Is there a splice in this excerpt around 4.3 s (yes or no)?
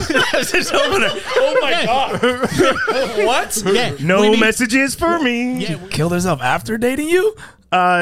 no